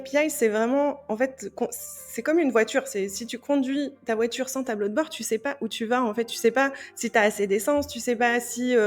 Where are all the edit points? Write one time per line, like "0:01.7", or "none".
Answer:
none